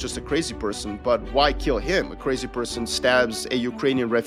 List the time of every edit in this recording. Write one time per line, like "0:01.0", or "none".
none